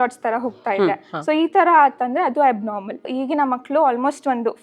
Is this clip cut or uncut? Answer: cut